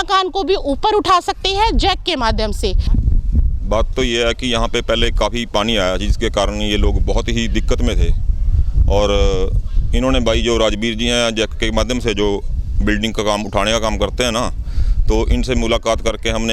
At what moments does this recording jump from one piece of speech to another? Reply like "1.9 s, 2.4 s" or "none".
2.9 s

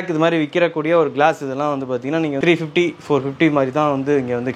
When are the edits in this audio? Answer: 2.4 s

